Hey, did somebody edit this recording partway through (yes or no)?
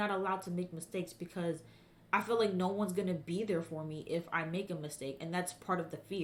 no